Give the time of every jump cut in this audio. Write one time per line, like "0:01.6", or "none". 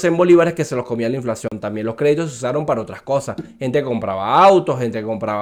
none